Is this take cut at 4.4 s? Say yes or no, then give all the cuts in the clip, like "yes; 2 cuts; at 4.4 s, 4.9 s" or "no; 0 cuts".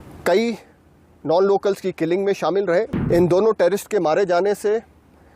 no; 1 cut; at 3.0 s